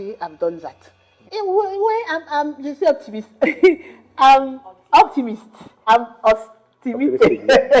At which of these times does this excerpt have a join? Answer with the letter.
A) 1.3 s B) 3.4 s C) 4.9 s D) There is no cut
A